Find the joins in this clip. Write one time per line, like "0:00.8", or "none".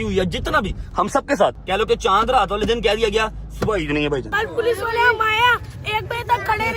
0:01.6
0:04.3

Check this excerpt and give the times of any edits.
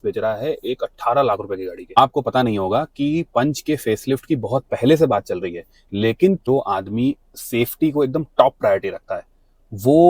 0:01.8
0:06.4

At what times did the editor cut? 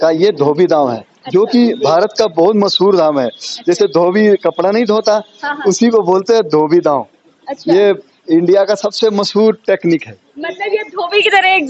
none

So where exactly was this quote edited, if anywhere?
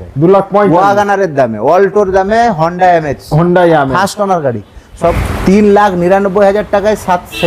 0:05.2

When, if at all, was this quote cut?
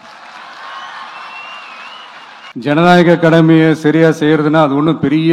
0:02.5

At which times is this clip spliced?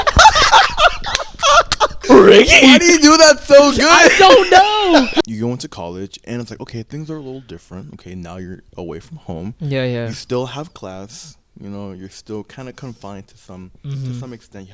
0:02.0
0:05.2

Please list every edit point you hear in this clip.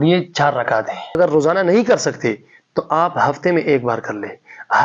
0:01.2

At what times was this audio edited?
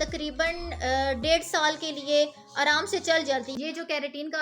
0:03.5

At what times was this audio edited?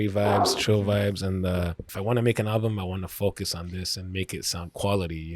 0:01.9

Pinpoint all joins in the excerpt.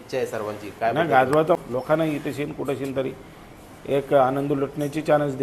0:01.6

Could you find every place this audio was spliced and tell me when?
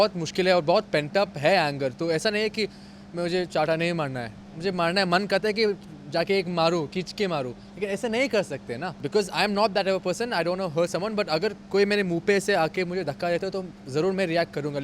0:09.0

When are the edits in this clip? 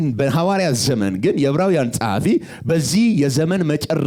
none

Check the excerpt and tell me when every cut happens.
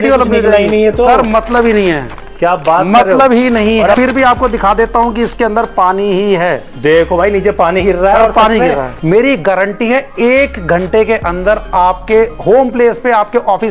0:03.9
0:08.9

